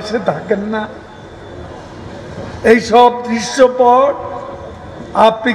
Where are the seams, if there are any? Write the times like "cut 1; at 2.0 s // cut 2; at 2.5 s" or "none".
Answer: none